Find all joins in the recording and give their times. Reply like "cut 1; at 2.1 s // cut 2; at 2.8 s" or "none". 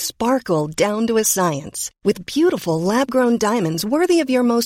none